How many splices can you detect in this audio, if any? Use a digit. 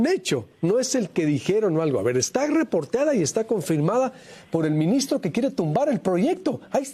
0